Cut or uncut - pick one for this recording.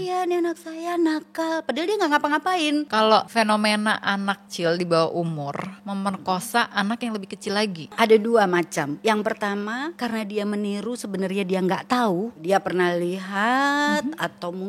cut